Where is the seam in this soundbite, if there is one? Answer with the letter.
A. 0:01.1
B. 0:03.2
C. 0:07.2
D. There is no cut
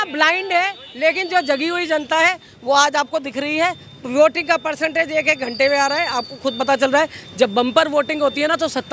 D